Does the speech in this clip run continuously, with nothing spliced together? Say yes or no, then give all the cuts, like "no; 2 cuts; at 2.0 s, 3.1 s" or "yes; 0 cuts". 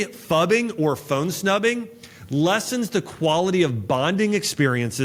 yes; 0 cuts